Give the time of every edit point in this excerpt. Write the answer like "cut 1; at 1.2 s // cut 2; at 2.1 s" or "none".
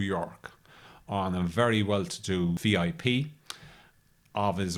cut 1; at 2.6 s

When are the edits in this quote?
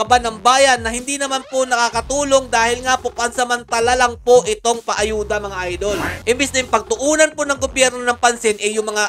cut 1; at 6.1 s

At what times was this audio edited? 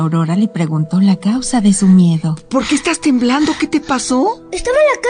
none

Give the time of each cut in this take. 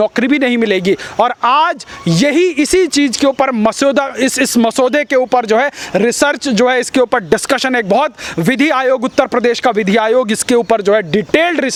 none

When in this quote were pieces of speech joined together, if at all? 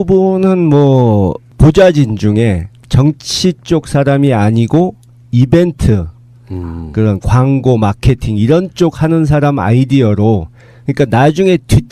none

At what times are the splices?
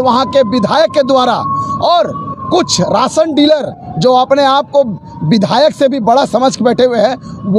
none

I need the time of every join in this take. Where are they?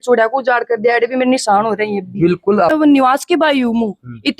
cut 1; at 2.7 s

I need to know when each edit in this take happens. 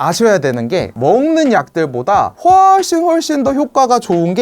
cut 1; at 0.9 s

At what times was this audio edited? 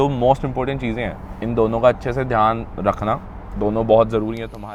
none

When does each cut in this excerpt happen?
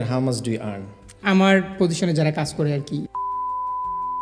cut 1; at 1.2 s

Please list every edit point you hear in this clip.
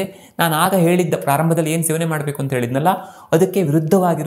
none

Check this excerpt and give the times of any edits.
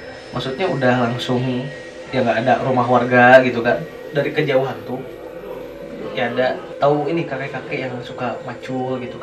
cut 1; at 4.0 s // cut 2; at 6.7 s

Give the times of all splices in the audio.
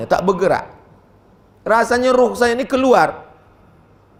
none

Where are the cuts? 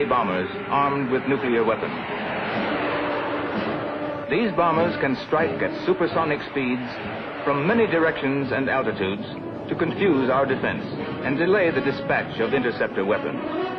none

